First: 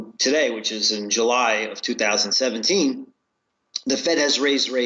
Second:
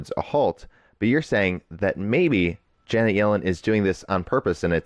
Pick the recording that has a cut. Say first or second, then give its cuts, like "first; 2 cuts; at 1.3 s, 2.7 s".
first; 1 cut; at 2.6 s